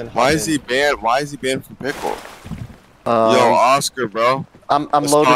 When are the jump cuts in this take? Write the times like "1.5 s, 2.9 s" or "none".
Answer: 3.1 s